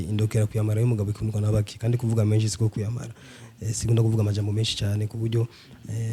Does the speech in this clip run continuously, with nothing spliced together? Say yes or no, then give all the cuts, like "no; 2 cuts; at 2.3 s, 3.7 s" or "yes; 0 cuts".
yes; 0 cuts